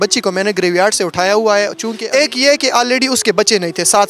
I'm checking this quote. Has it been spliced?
yes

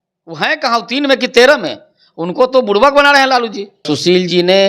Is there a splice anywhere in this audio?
yes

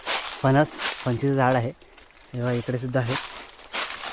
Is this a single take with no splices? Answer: yes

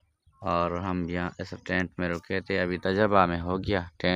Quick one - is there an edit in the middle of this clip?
no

